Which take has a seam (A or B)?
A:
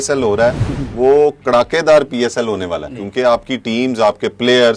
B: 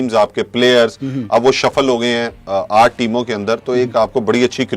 A